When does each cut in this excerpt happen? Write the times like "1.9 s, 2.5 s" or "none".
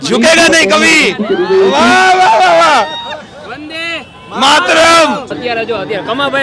none